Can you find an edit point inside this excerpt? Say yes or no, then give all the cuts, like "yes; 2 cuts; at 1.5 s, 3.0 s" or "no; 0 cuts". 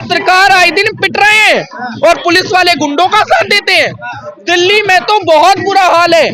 no; 0 cuts